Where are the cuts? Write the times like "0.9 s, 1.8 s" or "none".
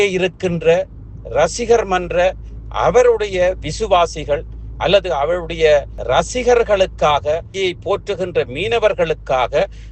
5.9 s, 7.5 s